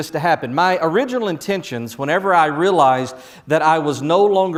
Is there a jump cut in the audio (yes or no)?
no